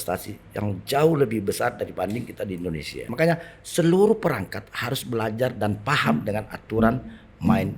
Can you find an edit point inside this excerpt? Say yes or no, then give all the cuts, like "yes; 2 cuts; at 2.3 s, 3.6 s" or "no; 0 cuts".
yes; 1 cut; at 3.1 s